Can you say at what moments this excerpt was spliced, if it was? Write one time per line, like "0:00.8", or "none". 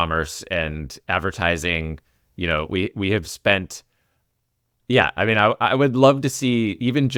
none